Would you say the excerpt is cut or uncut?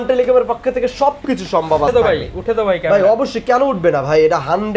cut